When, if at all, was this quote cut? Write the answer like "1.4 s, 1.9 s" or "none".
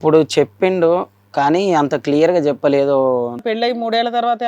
3.4 s